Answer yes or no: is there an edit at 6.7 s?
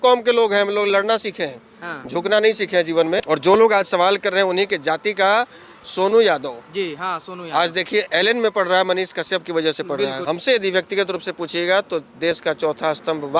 no